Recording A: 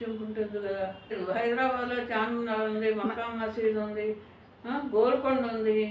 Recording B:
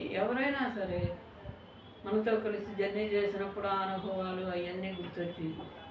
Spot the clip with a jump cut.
A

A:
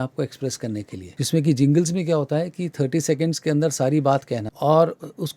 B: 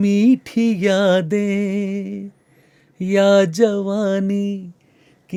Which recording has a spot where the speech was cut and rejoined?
A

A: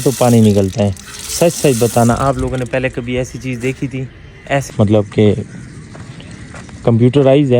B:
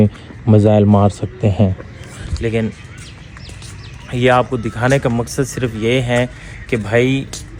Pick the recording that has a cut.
A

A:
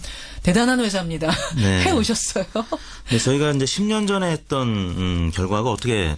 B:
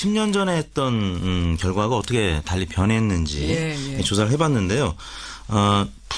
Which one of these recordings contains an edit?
B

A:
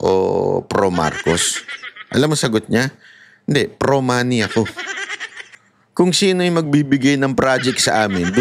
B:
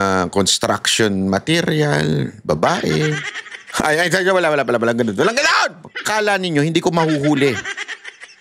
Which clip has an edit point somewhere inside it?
B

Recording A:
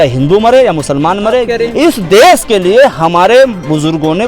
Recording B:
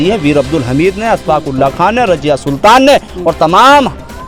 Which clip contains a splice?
A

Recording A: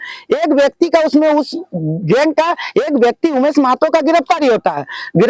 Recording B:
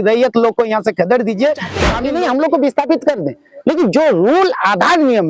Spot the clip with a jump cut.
B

